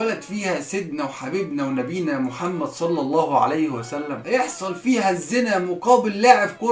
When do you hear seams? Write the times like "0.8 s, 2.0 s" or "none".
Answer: 4.2 s